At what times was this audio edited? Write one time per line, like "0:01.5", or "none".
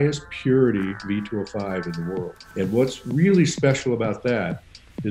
0:02.4